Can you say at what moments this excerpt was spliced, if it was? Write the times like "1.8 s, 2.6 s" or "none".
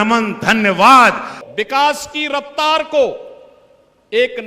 1.4 s